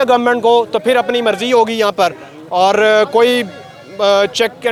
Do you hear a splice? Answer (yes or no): no